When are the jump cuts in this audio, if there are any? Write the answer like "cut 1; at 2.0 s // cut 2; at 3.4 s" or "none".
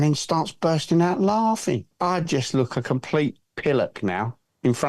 cut 1; at 1.9 s